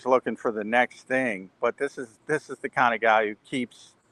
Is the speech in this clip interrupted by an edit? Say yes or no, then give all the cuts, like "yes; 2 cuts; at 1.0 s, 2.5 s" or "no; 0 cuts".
no; 0 cuts